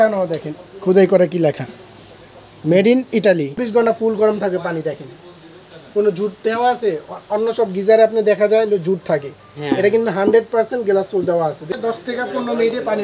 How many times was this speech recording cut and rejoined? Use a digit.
2